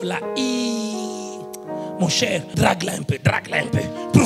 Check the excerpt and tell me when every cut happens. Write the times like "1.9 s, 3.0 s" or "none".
2.5 s

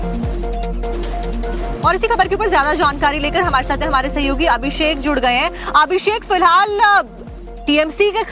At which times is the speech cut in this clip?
5.2 s

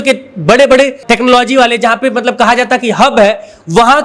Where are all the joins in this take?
1.0 s

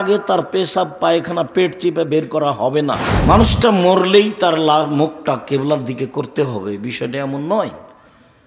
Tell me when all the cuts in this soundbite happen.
3.1 s

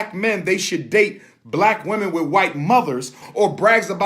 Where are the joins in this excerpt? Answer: 3.1 s

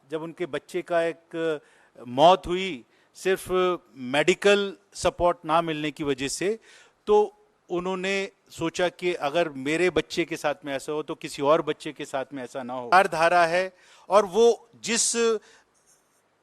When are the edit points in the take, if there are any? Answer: 12.9 s

